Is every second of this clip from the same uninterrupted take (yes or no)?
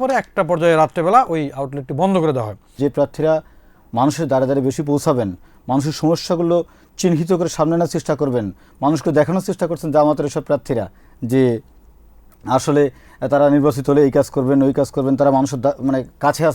no